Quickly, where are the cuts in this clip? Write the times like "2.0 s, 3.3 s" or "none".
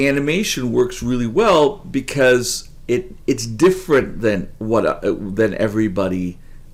none